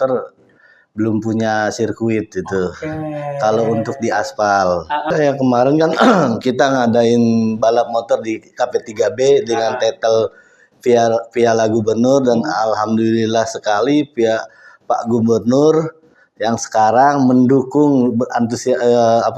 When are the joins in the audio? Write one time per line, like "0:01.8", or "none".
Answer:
0:05.1